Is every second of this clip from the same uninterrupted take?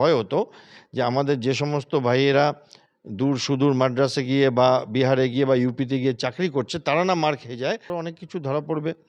no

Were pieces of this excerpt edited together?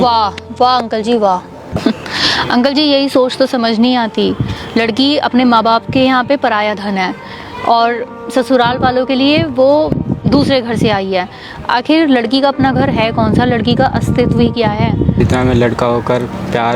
yes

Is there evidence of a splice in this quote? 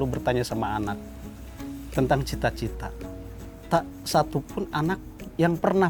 no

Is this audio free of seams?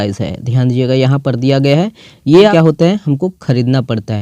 no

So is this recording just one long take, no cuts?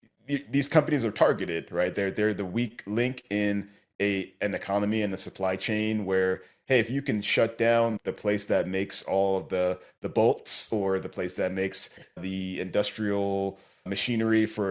yes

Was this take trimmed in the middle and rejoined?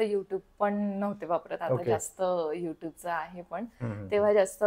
no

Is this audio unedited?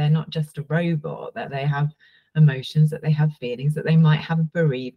yes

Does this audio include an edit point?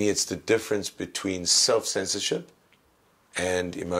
no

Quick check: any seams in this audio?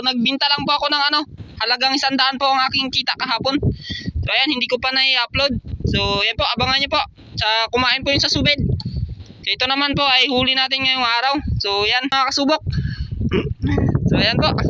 yes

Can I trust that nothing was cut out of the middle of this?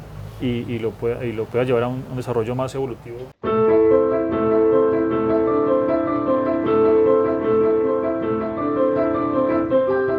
no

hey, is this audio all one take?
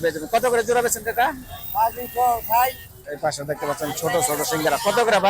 no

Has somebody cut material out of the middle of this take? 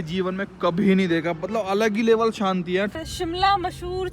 yes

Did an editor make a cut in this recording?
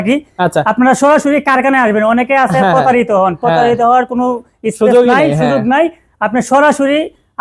no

